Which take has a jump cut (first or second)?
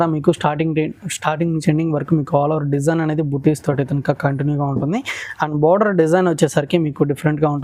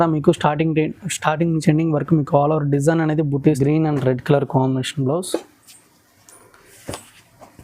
second